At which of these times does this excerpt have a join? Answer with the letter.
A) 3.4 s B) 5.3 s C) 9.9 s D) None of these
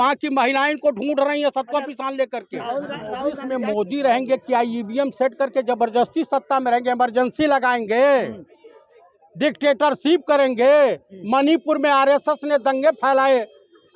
A